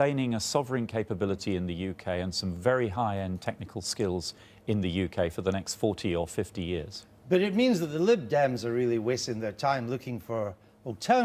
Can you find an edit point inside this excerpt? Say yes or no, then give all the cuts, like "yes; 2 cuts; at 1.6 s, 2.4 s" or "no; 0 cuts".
yes; 1 cut; at 5.7 s